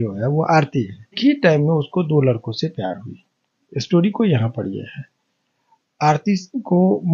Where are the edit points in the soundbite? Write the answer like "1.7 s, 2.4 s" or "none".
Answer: 1.2 s